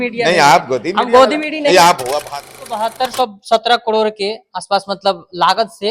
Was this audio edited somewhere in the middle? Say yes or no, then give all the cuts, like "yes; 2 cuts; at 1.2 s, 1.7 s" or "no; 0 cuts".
yes; 1 cut; at 2.3 s